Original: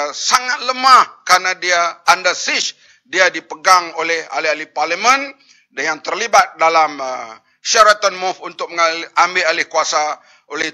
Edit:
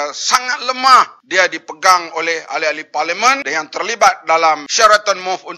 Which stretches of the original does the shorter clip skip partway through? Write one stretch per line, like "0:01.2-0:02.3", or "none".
0:01.2-0:03.0
0:05.3-0:05.8
0:07.0-0:07.6